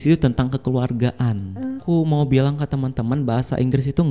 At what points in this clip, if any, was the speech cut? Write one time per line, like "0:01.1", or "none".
0:01.8